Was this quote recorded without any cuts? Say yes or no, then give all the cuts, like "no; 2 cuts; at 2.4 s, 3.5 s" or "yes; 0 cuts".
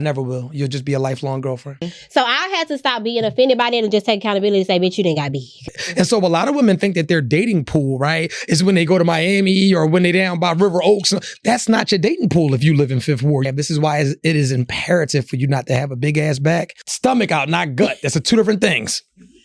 no; 4 cuts; at 2.0 s, 5.6 s, 13.4 s, 16.8 s